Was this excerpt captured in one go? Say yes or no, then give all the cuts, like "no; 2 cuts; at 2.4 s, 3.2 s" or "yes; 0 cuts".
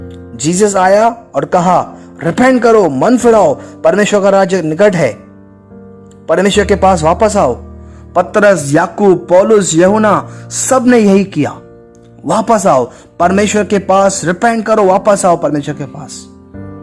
no; 1 cut; at 15.9 s